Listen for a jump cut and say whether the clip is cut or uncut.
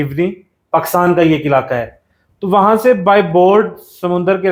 uncut